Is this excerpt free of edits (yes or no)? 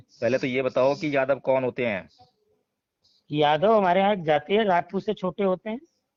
yes